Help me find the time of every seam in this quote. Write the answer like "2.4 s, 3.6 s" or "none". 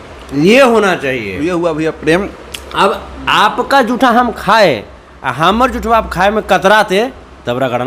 none